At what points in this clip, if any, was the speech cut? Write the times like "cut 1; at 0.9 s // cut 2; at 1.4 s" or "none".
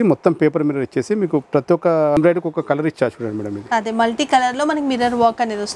cut 1; at 2.2 s